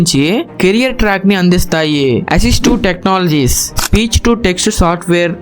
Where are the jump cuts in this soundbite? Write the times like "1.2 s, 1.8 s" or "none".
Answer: 2.2 s